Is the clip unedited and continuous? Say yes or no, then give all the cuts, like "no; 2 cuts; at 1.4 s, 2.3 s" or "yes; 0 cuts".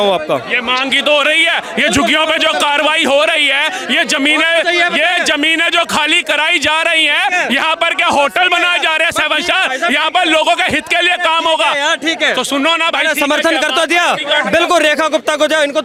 yes; 0 cuts